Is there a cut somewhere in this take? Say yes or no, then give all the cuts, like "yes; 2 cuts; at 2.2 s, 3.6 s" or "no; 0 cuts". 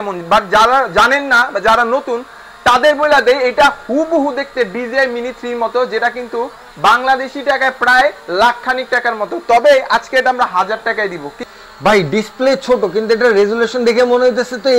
yes; 1 cut; at 11.4 s